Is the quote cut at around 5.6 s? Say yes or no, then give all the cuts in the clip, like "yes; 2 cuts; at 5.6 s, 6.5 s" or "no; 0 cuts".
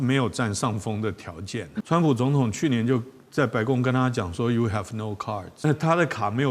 yes; 2 cuts; at 1.7 s, 5.6 s